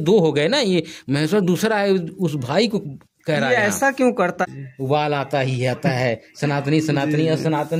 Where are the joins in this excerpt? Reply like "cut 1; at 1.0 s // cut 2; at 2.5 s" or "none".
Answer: cut 1; at 4.4 s